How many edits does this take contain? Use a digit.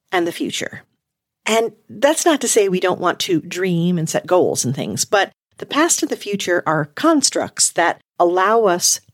1